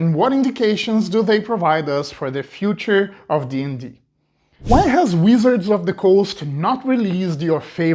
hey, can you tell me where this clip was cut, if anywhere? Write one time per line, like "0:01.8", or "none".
0:04.5